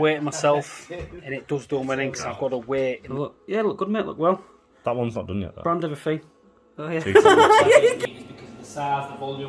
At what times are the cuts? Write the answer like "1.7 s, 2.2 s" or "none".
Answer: 3.1 s, 8.0 s